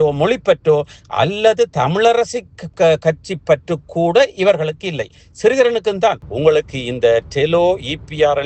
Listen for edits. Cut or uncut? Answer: cut